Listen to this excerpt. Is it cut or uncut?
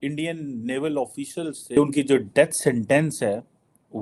cut